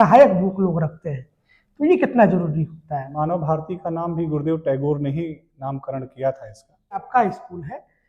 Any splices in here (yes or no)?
yes